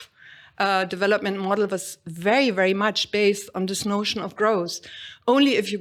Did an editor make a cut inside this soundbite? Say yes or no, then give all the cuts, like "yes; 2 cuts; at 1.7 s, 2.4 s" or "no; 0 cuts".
no; 0 cuts